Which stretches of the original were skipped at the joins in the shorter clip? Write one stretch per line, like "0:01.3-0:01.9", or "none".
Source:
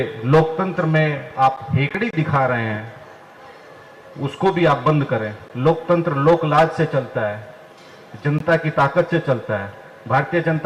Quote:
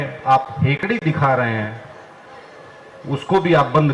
none